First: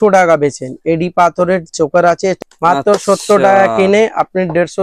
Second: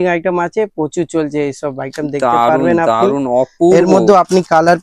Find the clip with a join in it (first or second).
first